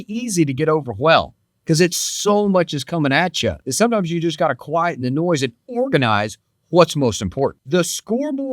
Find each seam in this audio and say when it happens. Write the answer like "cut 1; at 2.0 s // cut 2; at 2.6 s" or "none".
cut 1; at 3.6 s // cut 2; at 7.6 s